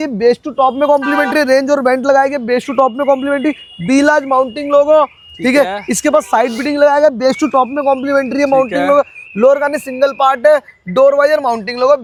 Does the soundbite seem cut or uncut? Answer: uncut